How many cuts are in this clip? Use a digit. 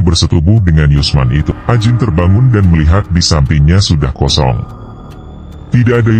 1